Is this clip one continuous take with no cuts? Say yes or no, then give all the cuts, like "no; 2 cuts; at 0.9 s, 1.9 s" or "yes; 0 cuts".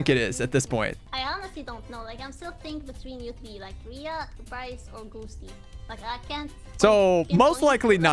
no; 1 cut; at 1.0 s